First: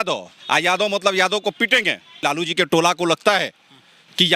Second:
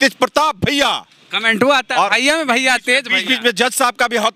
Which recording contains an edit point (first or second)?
first